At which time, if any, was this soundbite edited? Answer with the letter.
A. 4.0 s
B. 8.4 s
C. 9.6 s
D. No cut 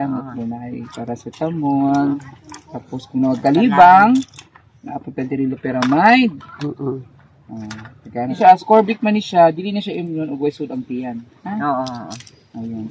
B